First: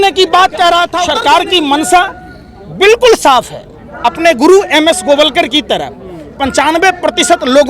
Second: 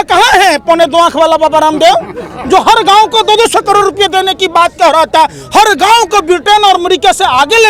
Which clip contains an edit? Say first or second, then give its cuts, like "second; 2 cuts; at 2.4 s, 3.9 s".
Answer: first; 1 cut; at 1.0 s